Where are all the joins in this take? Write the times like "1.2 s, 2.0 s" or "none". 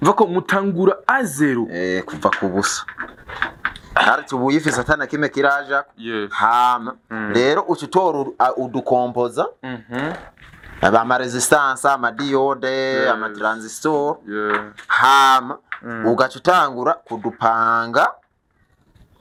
none